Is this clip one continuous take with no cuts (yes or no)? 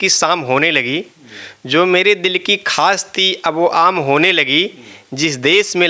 yes